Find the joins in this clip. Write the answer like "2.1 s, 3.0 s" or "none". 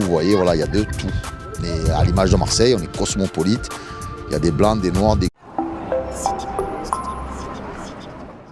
none

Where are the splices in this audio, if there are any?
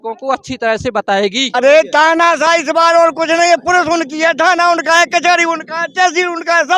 1.5 s

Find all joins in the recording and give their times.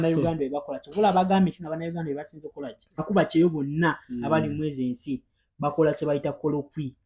3.0 s

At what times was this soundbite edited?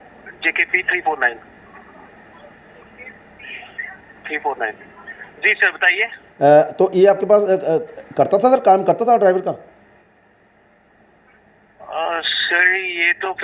none

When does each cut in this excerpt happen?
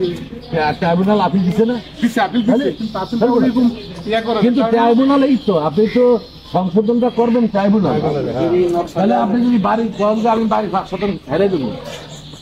none

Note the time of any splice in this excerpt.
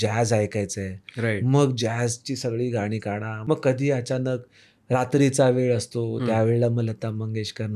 3.3 s

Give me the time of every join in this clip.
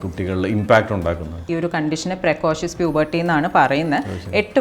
1.4 s

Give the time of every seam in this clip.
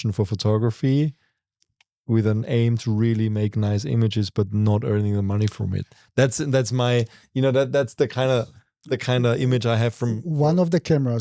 none

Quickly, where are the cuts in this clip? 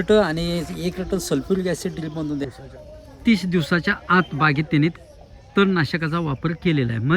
2.5 s

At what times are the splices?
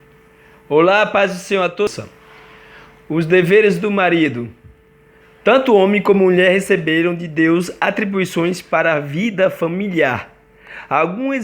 1.9 s

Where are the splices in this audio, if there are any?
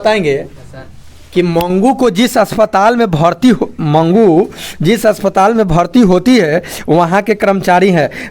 none

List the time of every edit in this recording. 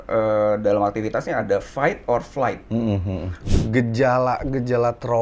3.3 s

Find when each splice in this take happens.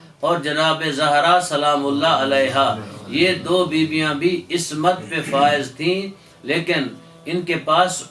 none

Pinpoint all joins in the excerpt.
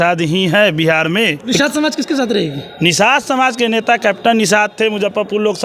1.5 s

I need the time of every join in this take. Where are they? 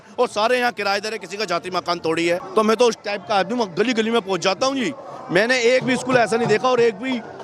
2.4 s

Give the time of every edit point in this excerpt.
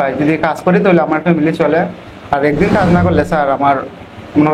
none

